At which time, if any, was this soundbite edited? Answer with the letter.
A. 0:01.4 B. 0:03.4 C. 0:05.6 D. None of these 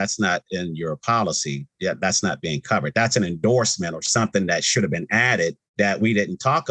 C